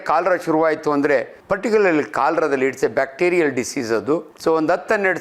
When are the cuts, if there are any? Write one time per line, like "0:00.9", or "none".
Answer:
0:01.4
0:04.3